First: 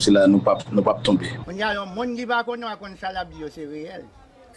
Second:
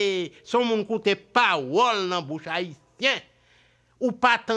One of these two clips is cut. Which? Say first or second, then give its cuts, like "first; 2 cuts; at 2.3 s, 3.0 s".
first; 1 cut; at 1.4 s